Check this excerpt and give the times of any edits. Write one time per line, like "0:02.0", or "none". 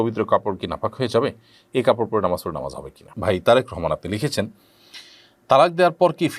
0:03.1